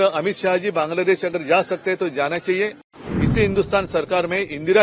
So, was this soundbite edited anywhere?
yes; 1 cut; at 2.8 s

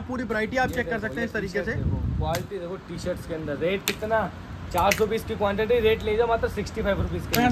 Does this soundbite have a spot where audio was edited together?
no; 0 cuts

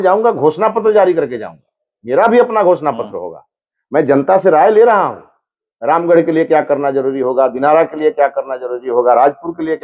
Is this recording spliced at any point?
no; 0 cuts

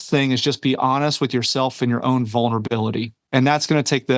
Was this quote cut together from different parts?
yes; 1 cut; at 3.1 s

